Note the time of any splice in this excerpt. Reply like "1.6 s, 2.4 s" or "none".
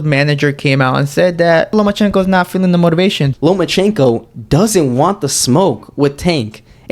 1.7 s, 3.3 s